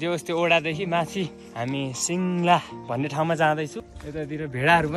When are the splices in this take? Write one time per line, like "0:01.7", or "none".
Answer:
0:03.8

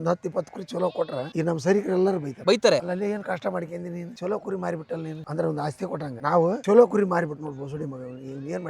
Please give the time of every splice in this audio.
0:06.1

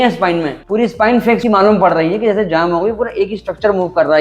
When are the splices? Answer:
none

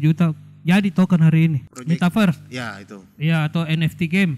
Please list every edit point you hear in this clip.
0:01.7

